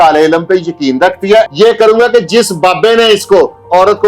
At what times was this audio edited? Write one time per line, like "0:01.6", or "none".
0:01.5